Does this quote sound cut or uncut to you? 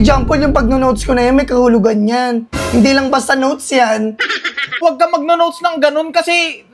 cut